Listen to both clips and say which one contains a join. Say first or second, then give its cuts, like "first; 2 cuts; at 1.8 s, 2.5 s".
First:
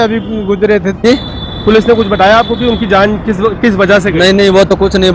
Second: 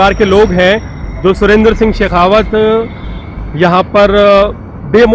first; 1 cut; at 1.0 s